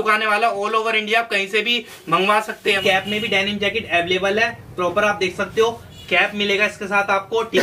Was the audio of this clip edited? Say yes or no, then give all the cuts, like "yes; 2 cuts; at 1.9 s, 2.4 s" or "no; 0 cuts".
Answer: yes; 1 cut; at 2.8 s